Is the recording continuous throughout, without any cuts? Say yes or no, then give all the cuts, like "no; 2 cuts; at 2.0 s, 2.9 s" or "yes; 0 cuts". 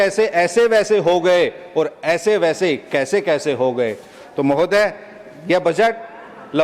yes; 0 cuts